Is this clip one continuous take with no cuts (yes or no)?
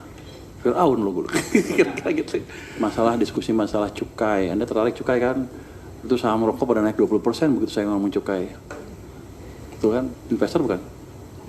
no